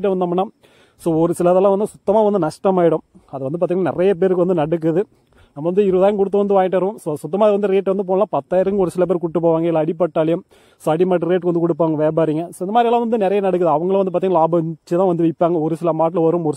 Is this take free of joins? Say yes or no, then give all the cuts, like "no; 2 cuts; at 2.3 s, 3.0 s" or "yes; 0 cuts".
yes; 0 cuts